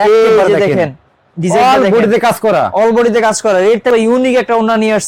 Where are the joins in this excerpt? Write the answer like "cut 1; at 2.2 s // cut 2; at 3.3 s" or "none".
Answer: cut 1; at 3.9 s